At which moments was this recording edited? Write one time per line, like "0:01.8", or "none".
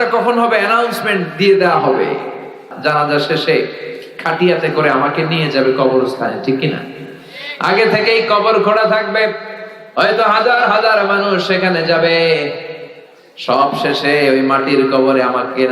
0:02.6